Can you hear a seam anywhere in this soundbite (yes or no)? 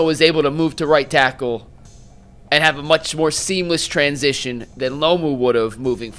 no